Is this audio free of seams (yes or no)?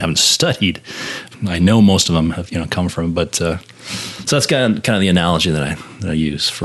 no